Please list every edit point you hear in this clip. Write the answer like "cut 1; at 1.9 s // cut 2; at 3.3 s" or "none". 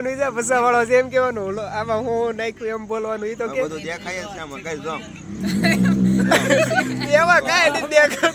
none